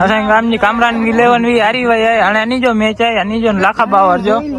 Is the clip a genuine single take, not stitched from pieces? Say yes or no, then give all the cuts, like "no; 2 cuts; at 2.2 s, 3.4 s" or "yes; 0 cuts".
yes; 0 cuts